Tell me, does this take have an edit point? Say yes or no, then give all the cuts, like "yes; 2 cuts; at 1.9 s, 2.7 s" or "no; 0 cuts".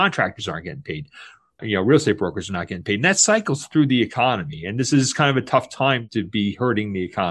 no; 0 cuts